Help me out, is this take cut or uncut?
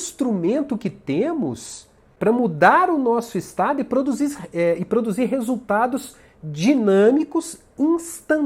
cut